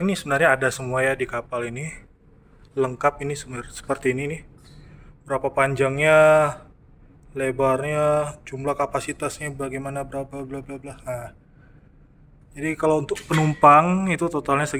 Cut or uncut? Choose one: uncut